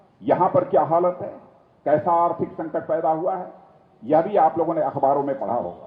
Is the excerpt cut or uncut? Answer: uncut